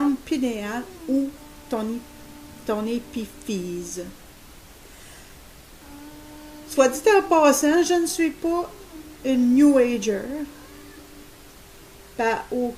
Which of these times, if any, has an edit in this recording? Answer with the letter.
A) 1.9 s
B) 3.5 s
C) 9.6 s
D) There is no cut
C